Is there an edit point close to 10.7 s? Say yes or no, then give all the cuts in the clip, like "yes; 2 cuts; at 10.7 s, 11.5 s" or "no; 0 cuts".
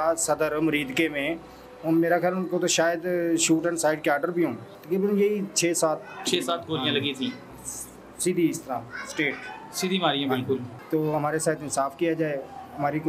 yes; 2 cuts; at 4.7 s, 10.7 s